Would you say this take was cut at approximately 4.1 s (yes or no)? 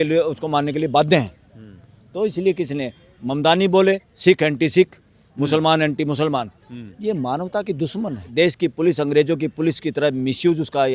yes